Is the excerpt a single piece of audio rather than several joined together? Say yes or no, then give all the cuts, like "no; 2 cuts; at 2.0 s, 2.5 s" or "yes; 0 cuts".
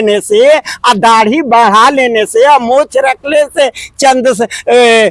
yes; 0 cuts